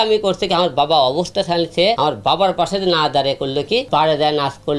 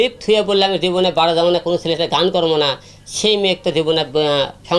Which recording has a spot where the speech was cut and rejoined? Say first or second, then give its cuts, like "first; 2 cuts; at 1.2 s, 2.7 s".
first; 2 cuts; at 2.0 s, 3.9 s